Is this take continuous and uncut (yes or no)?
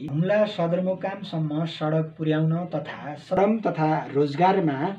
no